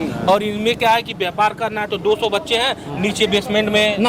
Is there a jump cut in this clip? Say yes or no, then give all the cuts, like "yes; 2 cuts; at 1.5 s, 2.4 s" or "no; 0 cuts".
no; 0 cuts